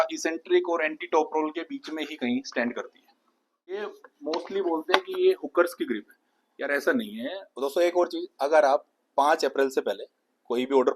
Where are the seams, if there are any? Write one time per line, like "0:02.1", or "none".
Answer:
0:03.7
0:07.4